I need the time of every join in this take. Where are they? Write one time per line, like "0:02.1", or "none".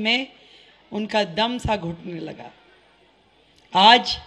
none